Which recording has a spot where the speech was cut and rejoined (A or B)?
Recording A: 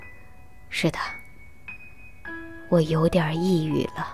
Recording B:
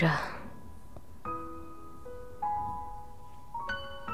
B